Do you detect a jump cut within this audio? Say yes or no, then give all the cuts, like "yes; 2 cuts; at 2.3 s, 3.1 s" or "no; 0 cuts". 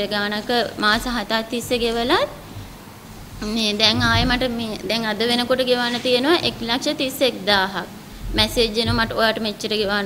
no; 0 cuts